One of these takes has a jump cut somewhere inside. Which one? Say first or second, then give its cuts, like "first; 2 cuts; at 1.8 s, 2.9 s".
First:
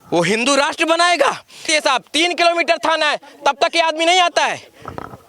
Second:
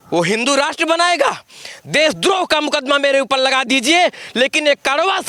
first; 1 cut; at 1.6 s